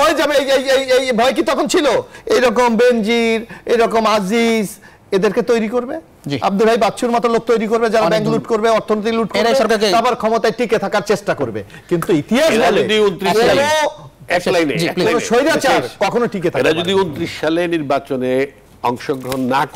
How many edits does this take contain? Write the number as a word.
one